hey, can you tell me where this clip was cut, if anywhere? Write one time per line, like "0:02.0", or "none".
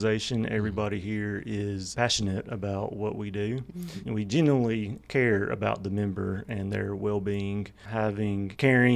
0:07.8